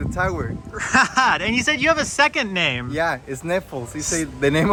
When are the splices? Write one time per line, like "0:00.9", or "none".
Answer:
none